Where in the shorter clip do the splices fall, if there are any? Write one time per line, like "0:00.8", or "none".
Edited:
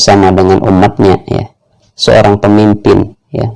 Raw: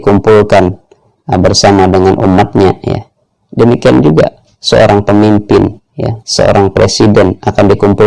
0:01.8